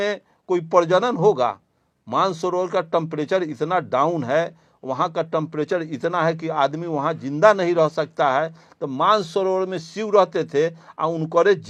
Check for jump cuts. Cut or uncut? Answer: uncut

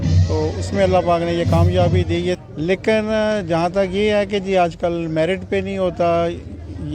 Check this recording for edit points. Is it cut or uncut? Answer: cut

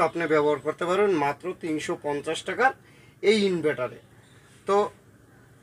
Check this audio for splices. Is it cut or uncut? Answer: uncut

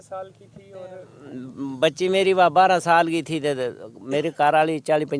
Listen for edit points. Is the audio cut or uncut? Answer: uncut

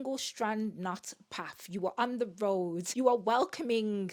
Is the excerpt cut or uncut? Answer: cut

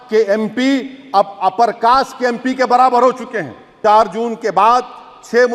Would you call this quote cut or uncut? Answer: cut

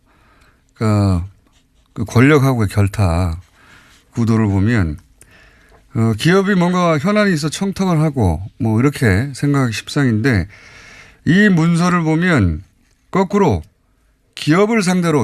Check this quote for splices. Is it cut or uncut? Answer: cut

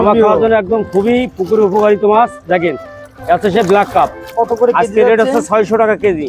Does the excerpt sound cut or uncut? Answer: cut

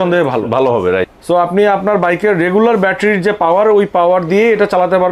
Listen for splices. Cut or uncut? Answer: cut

